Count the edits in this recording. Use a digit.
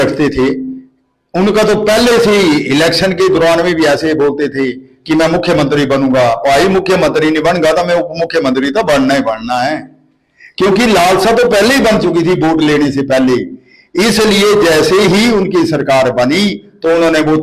0